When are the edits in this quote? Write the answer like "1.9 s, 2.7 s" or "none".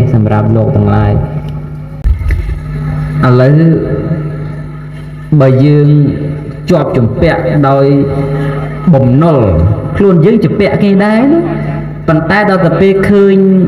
2.1 s